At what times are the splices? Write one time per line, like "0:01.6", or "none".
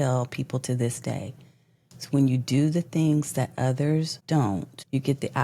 0:04.2